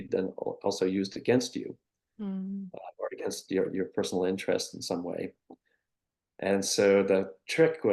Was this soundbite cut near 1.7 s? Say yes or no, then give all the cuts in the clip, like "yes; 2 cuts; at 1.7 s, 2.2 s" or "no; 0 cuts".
no; 0 cuts